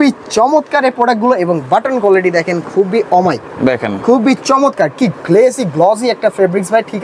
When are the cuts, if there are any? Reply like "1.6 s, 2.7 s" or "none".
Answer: none